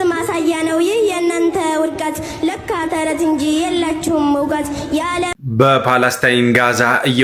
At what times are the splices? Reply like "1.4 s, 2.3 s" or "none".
5.3 s